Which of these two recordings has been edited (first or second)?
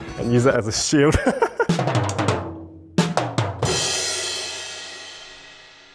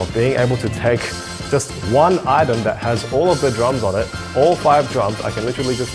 first